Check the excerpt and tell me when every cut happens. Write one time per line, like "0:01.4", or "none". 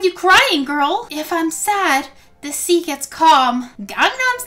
0:01.1